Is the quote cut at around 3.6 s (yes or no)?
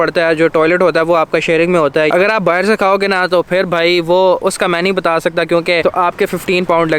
no